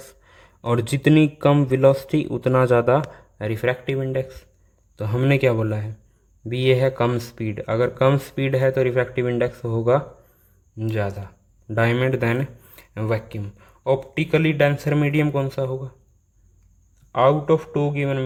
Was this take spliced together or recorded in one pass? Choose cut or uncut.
uncut